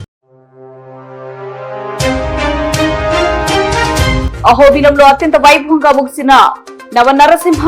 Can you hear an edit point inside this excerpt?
yes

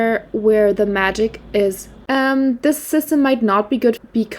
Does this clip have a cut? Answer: yes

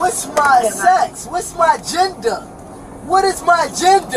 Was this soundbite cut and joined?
no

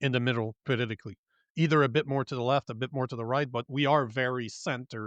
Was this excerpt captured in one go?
yes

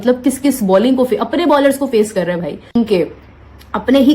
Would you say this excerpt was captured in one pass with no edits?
no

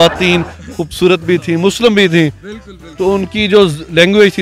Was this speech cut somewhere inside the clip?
no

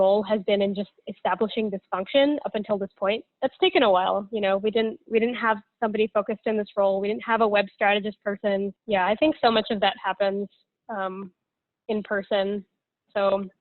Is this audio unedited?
no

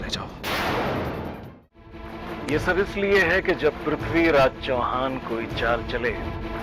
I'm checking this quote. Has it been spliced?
yes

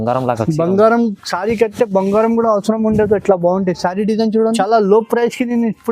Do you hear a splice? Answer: yes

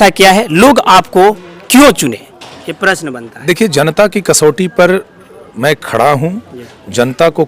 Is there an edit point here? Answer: no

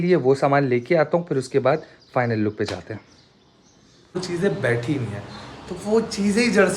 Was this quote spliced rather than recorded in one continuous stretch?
yes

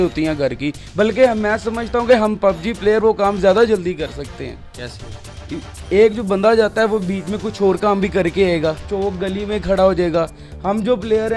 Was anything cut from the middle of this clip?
no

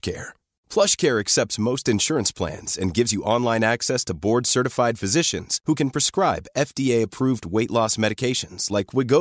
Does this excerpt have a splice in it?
no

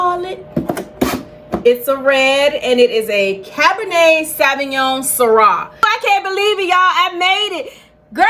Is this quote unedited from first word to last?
no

